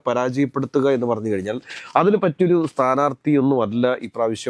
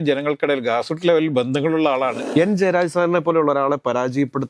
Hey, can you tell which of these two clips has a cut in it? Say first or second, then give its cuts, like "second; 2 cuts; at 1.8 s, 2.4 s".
second; 1 cut; at 2.2 s